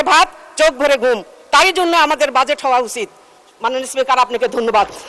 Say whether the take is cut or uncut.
uncut